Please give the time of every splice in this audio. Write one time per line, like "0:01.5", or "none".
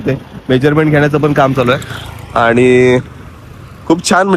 none